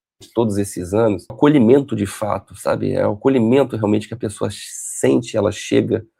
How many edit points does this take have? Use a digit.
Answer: 1